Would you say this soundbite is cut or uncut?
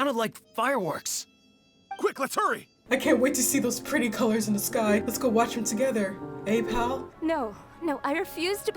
cut